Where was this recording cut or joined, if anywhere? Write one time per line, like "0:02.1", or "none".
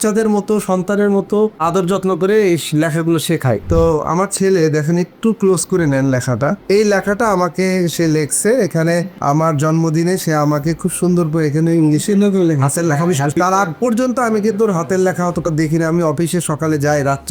0:01.6
0:03.6